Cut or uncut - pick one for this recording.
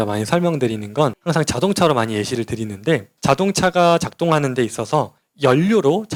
uncut